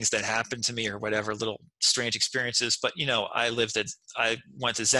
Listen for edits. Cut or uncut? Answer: uncut